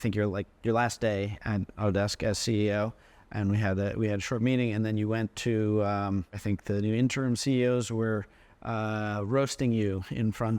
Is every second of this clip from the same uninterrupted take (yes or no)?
no